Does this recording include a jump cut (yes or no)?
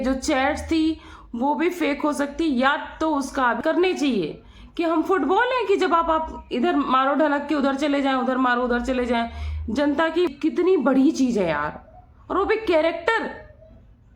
yes